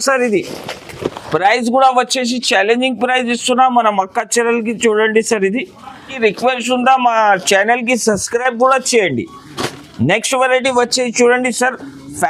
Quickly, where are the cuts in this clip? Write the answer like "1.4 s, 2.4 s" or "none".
6.0 s